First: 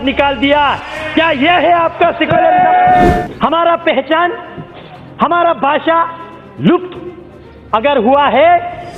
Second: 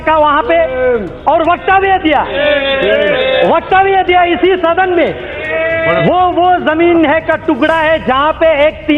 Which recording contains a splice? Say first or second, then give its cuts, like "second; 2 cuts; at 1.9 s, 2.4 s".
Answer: first; 1 cut; at 3.1 s